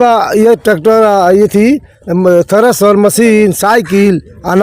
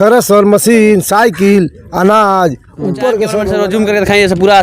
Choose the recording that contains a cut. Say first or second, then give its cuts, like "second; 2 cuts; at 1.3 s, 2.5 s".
second; 1 cut; at 3.5 s